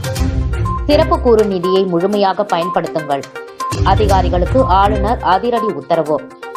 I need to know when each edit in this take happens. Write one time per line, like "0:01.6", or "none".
none